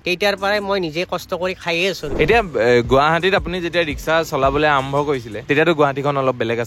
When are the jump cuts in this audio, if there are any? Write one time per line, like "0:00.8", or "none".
0:02.1